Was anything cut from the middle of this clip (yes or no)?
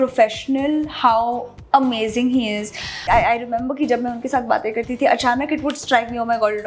yes